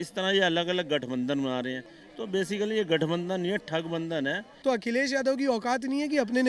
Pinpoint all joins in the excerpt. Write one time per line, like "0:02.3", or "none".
0:04.5